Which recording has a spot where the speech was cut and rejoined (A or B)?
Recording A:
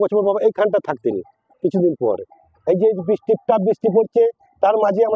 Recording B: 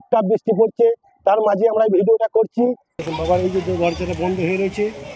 B